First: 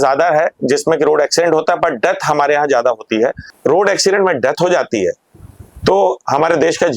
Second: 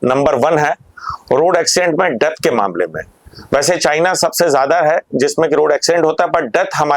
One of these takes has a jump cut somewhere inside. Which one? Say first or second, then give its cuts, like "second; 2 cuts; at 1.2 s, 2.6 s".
first; 1 cut; at 3.5 s